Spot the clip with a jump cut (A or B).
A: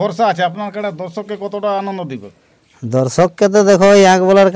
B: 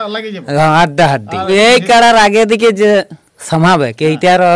B